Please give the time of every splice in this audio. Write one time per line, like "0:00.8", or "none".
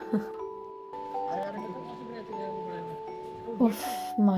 0:01.4